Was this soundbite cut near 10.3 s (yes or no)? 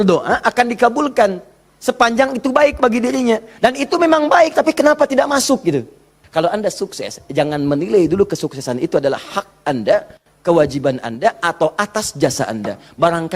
no